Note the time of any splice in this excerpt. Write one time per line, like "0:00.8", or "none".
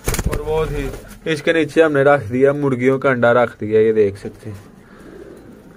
none